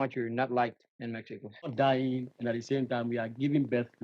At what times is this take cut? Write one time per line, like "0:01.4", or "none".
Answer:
0:01.7